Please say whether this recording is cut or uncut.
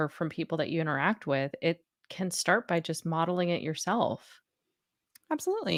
uncut